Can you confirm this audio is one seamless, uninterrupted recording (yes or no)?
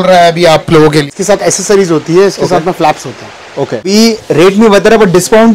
no